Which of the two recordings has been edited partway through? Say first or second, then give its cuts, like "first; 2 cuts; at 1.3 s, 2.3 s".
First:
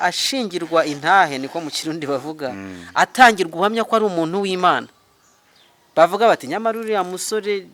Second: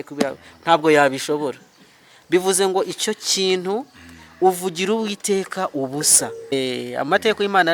second; 1 cut; at 6.5 s